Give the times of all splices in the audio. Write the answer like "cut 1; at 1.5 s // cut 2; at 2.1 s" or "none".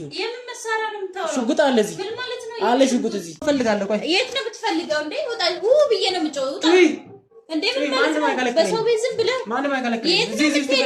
cut 1; at 3.4 s